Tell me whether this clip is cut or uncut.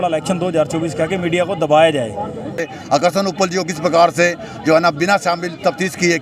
cut